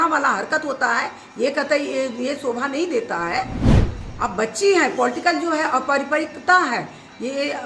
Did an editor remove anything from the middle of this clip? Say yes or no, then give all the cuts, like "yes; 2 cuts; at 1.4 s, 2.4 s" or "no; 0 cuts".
no; 0 cuts